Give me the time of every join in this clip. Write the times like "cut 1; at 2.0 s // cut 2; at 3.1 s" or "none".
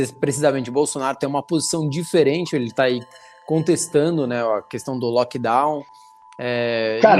none